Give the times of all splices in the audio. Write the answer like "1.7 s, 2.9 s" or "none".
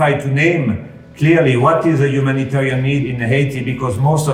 3.1 s